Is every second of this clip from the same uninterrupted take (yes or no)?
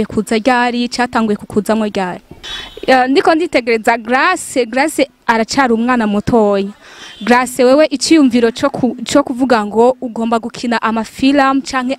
no